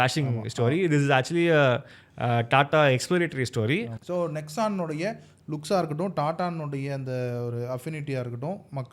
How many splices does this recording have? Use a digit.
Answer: 1